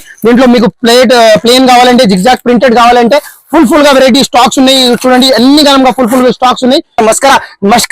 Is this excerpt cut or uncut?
cut